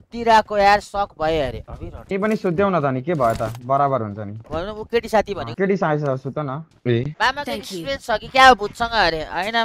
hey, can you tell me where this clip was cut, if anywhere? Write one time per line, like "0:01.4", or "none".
0:01.6
0:04.4
0:07.1